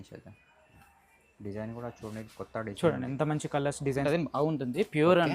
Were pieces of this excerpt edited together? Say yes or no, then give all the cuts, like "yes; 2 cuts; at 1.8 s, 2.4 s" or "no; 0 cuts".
yes; 1 cut; at 4.1 s